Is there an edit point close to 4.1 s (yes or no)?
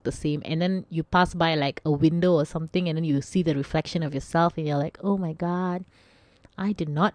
no